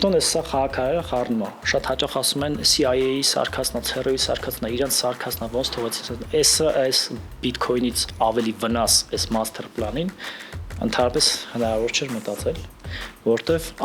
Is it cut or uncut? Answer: uncut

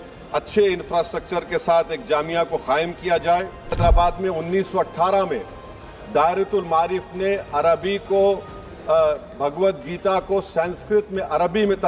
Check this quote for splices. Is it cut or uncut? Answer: cut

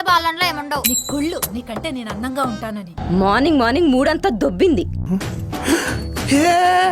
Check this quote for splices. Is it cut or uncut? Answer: cut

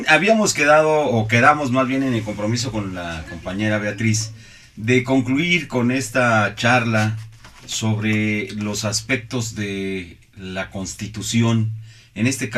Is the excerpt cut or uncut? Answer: cut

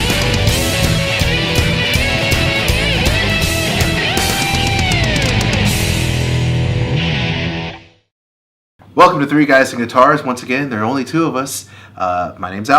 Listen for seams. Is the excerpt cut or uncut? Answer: cut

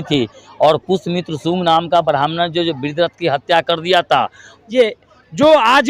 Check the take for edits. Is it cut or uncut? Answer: cut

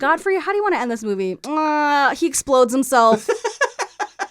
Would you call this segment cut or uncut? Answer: cut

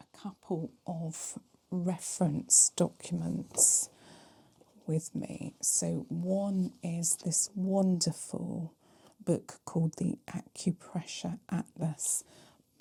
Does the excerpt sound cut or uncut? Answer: uncut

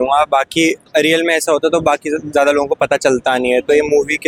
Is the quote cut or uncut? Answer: uncut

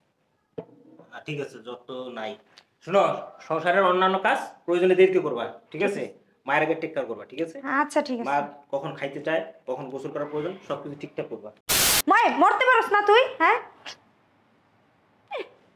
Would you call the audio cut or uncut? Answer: cut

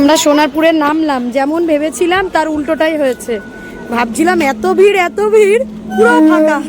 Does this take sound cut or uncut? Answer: uncut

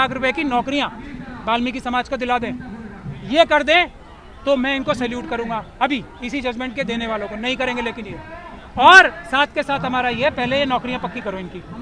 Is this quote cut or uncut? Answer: uncut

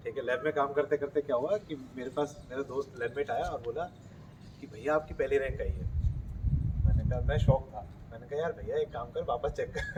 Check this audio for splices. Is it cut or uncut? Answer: uncut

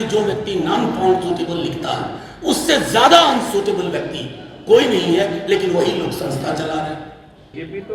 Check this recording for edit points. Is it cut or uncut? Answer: uncut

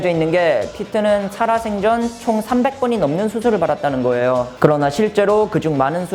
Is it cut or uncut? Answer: cut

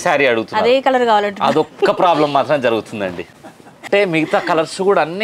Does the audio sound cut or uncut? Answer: cut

